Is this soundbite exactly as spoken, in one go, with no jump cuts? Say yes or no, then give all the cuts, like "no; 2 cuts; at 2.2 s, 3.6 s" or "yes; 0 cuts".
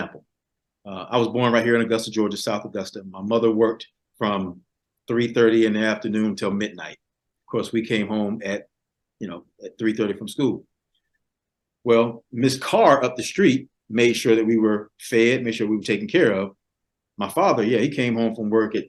yes; 0 cuts